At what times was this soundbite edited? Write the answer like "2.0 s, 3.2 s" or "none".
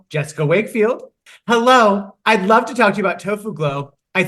1.1 s